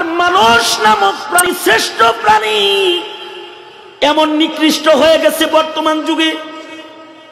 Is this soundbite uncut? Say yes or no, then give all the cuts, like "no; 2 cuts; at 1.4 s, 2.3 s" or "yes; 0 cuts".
no; 1 cut; at 1.4 s